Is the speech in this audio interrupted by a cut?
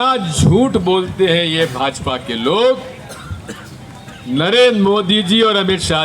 no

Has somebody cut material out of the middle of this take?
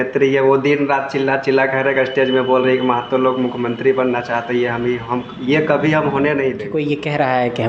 yes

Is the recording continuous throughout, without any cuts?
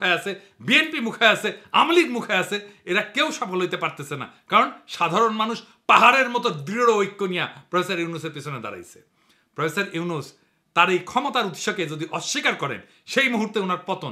yes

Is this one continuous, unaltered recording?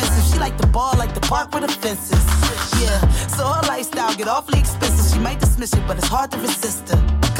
yes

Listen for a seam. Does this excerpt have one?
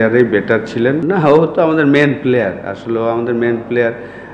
yes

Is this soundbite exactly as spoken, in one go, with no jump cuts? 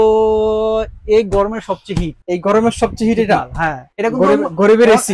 no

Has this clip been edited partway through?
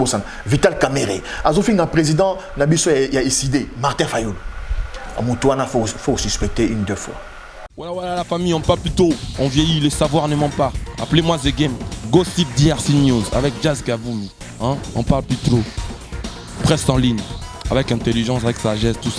yes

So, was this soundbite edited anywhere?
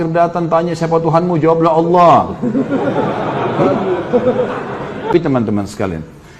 yes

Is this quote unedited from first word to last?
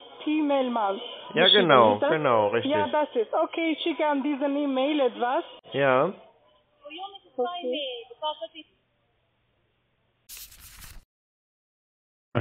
yes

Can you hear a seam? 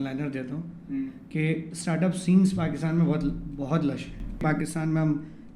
yes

